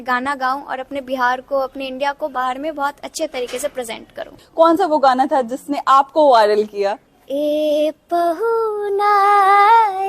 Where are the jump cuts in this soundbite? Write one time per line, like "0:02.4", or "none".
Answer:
0:04.4
0:07.1